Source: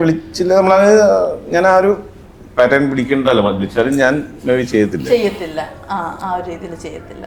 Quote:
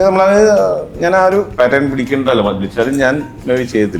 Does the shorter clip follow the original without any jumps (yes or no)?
no